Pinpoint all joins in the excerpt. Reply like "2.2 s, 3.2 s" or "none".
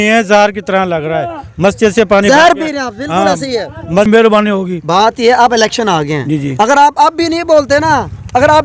4.1 s